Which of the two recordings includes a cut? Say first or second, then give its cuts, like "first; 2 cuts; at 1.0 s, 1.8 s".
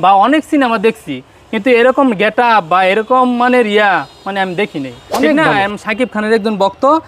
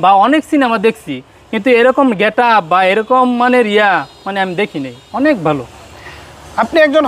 first; 1 cut; at 5.3 s